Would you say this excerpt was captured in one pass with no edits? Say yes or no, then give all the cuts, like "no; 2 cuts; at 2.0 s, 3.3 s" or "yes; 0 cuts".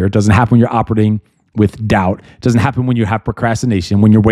yes; 0 cuts